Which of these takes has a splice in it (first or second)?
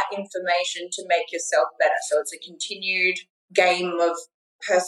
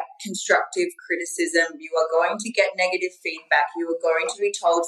first